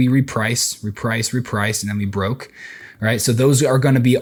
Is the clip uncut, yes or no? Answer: yes